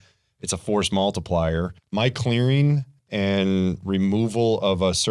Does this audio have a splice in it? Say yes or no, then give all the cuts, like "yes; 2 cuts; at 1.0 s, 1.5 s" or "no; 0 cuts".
yes; 1 cut; at 1.8 s